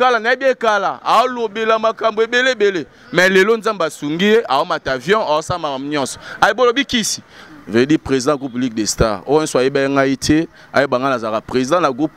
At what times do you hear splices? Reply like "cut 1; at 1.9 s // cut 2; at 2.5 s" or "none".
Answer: cut 1; at 7.4 s